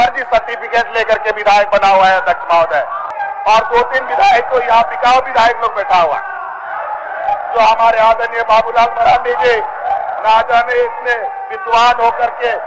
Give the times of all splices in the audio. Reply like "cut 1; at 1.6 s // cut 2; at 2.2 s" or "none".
cut 1; at 3.1 s